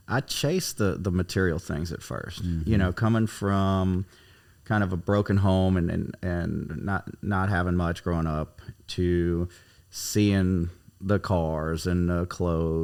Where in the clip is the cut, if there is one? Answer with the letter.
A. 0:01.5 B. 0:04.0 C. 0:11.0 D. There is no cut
D